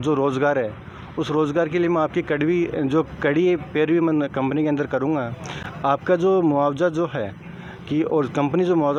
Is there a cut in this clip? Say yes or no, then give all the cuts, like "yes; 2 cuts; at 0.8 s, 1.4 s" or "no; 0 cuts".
no; 0 cuts